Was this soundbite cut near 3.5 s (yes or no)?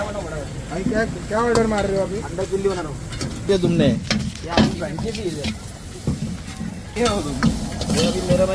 yes